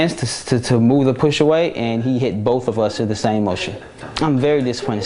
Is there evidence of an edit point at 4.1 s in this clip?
yes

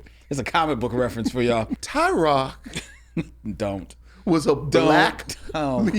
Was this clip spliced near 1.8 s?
yes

